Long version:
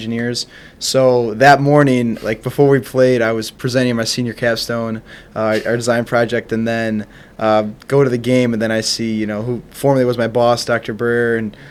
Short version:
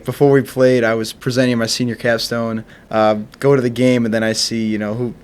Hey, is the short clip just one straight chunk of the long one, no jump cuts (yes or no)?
no